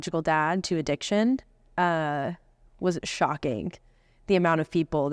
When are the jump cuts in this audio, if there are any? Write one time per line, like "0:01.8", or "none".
none